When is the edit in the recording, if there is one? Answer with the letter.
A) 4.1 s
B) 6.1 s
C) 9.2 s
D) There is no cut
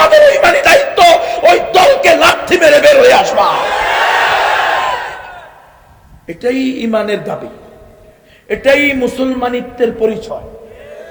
D